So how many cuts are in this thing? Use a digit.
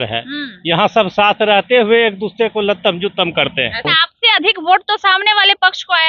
1